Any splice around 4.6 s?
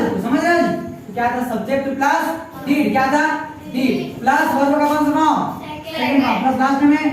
no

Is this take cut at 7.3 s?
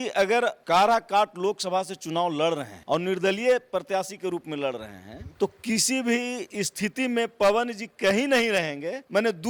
no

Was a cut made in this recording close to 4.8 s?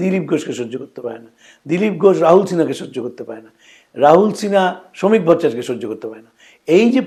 no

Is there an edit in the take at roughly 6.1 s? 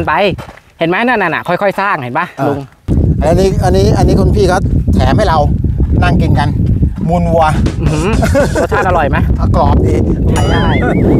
no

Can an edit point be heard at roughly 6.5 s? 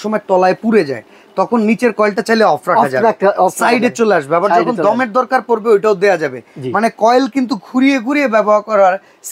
no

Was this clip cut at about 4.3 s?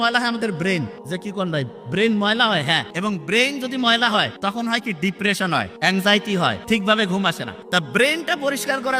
yes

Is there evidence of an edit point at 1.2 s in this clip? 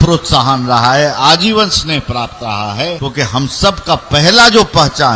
no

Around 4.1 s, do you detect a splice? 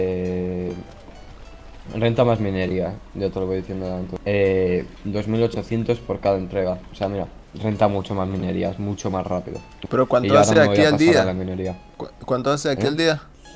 yes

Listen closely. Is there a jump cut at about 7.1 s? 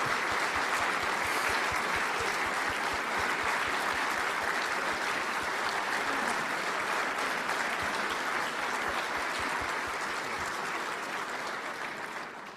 no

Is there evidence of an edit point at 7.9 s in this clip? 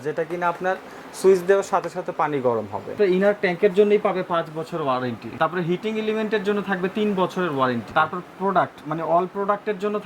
yes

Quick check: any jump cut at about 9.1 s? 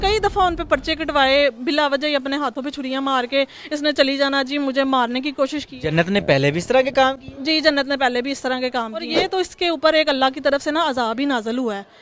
yes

